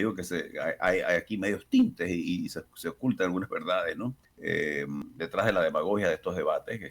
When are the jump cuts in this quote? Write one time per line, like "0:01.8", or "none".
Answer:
0:04.3
0:05.0